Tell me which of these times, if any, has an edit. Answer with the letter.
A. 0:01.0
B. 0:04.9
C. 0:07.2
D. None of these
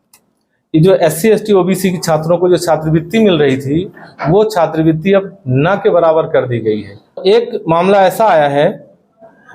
C